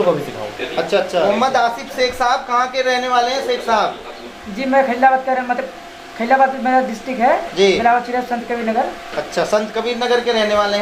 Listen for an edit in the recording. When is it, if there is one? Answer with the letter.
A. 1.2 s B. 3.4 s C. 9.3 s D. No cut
A